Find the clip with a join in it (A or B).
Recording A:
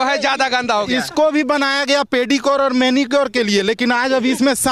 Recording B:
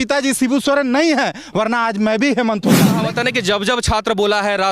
B